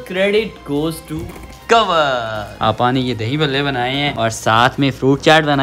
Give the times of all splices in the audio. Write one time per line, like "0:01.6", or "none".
0:02.5